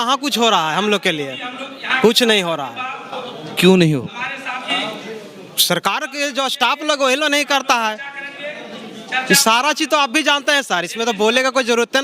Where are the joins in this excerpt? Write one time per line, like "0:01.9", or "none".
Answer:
none